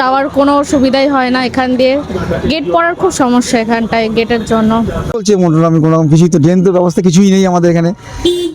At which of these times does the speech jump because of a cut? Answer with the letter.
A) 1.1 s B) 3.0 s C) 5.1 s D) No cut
C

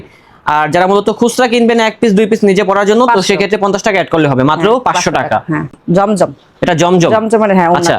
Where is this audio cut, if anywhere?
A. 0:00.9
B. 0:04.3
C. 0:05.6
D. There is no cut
D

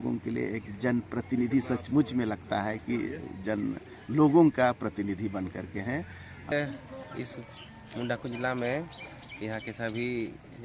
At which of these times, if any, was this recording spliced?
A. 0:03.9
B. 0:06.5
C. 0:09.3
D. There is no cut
B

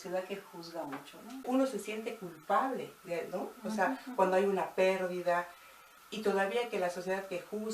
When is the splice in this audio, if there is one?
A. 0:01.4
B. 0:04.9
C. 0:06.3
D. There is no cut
A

